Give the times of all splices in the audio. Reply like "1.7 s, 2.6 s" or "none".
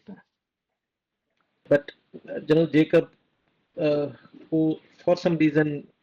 1.7 s